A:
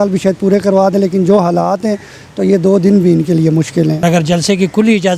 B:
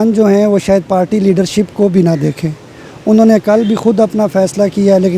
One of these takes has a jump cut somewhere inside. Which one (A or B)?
A